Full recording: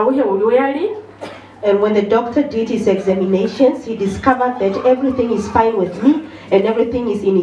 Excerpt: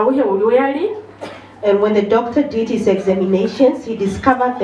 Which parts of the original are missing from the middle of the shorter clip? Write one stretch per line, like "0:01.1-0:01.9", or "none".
none